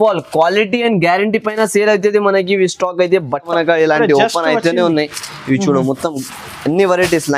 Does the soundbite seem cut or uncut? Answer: cut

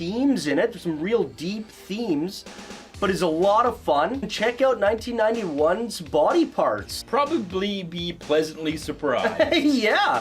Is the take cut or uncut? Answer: cut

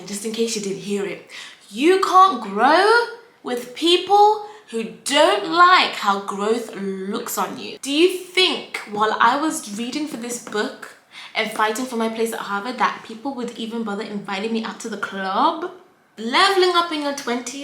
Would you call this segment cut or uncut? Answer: cut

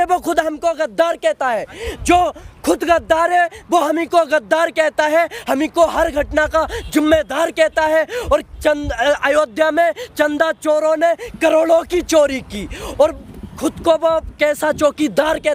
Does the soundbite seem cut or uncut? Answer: uncut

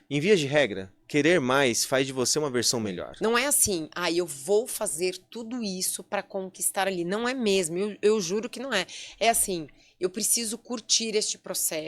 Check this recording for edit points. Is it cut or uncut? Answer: cut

